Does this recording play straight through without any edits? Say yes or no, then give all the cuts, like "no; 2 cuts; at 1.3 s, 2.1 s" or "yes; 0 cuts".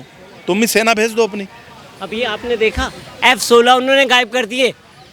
yes; 0 cuts